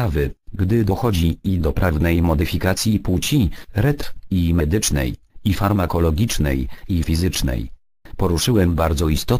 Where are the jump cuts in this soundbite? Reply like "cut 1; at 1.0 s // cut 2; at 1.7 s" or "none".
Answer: cut 1; at 1.1 s